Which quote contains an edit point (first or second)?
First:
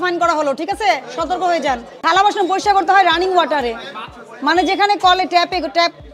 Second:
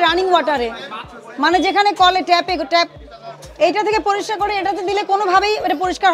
first